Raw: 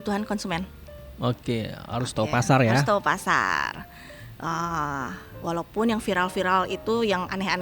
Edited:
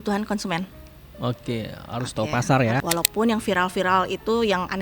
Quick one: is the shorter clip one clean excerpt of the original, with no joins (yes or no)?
no